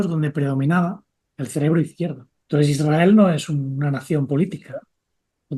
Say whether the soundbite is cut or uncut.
cut